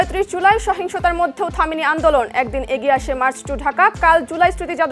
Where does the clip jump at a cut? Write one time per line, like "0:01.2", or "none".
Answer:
none